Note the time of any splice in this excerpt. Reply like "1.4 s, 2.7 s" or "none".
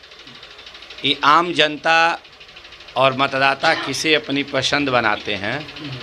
none

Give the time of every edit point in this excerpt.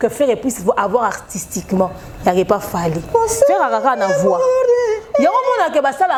none

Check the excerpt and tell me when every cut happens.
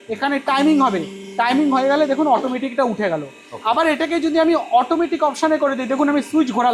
none

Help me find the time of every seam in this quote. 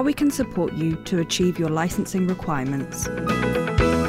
3.1 s

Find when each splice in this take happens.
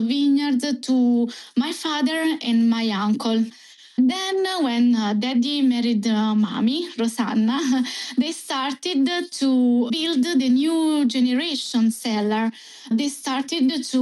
3.5 s, 12.7 s

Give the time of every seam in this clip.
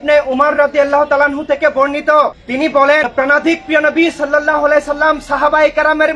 none

